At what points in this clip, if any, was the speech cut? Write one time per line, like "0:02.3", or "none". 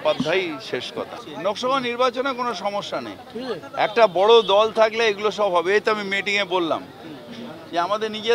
0:01.0